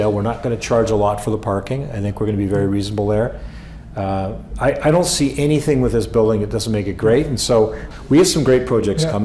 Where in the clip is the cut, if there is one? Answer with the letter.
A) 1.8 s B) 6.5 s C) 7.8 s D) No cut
C